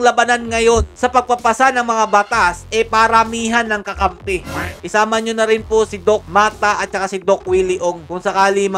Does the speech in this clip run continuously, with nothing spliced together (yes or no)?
no